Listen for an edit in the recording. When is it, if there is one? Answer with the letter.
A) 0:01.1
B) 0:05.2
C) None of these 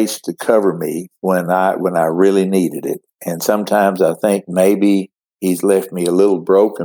A